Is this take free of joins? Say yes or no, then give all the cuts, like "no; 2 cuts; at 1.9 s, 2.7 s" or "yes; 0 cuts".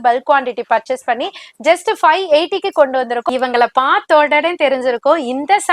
no; 1 cut; at 3.2 s